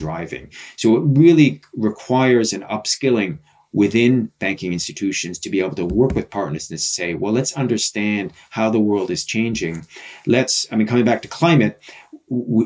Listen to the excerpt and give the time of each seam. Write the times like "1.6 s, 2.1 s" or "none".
none